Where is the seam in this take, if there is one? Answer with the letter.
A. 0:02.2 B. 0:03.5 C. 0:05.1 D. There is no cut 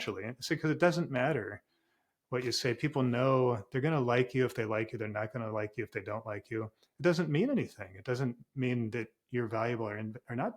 D